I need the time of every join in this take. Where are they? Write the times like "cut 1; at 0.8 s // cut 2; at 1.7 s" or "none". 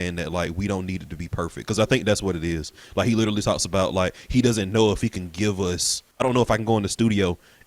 cut 1; at 6.1 s